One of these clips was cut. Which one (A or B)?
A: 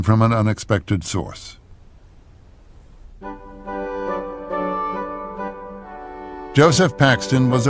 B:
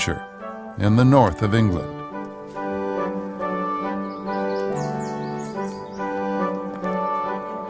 B